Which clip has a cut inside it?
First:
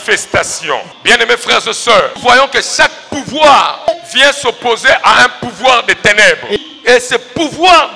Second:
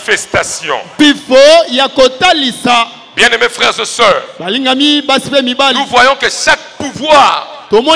first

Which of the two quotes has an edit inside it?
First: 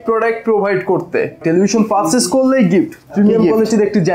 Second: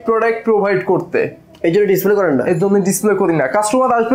first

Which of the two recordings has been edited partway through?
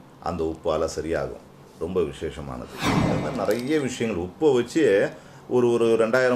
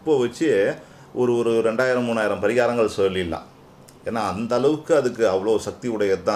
first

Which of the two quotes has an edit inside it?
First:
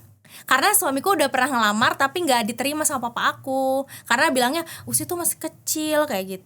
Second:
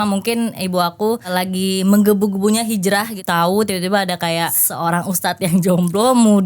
second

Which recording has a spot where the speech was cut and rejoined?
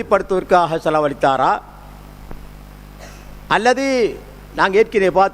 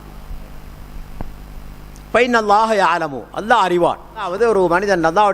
second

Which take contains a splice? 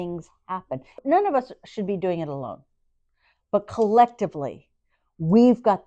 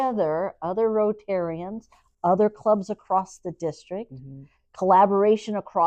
first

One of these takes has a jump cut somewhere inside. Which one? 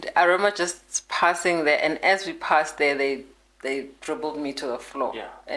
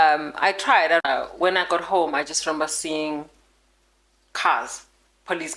second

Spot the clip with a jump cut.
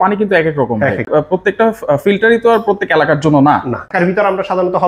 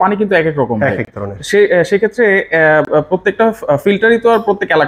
first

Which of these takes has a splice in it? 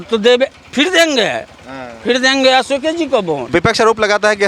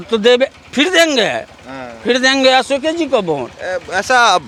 first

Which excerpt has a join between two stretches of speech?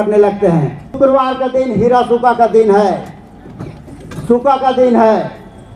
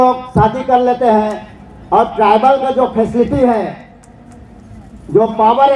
first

